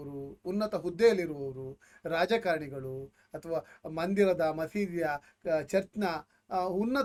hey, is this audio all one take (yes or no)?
yes